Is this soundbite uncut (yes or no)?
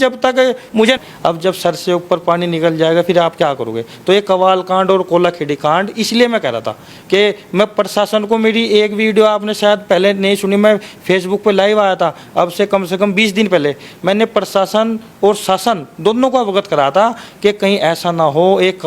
no